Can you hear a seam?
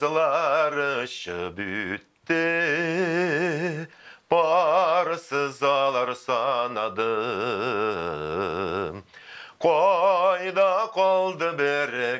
no; 0 cuts

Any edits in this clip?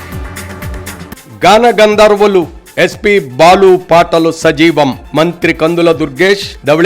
yes; 1 cut; at 0.9 s

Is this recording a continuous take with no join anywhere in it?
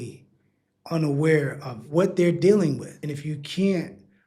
no; 2 cuts; at 1.8 s, 3.0 s

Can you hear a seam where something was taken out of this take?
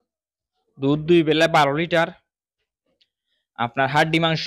no; 0 cuts

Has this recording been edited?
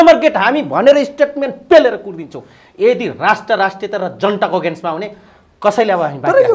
no; 0 cuts

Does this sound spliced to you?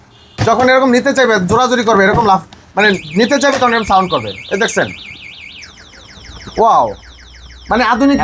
no; 0 cuts

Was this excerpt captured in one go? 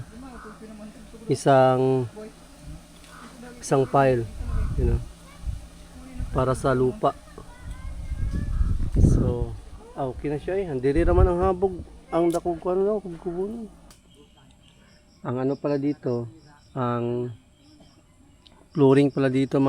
no; 1 cut; at 13.9 s

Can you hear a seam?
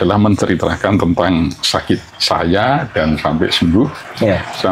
no; 0 cuts

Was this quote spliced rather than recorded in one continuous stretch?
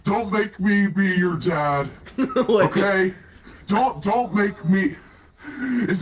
no; 0 cuts

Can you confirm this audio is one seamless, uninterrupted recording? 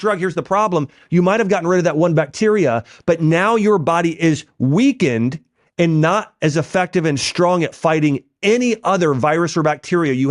yes; 0 cuts

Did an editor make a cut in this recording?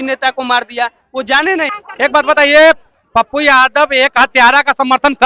yes; 1 cut; at 1.8 s

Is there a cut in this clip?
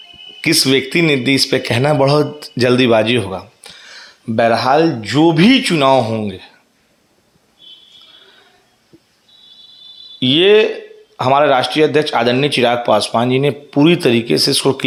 no; 0 cuts

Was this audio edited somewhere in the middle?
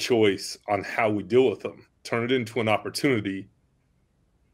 yes; 1 cut; at 2.0 s

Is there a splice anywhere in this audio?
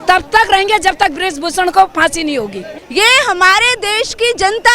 yes; 1 cut; at 2.8 s

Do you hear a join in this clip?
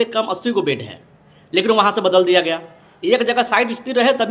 no; 0 cuts

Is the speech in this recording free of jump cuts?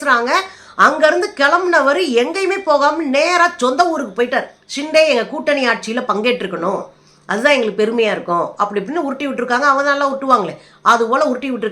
no; 1 cut; at 4.6 s

